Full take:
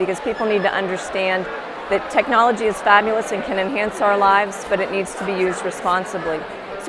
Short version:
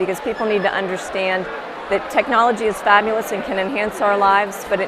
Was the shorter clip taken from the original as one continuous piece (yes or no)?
yes